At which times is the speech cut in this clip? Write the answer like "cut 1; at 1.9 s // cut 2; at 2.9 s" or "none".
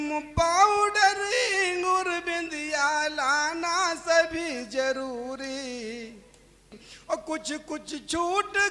cut 1; at 6.9 s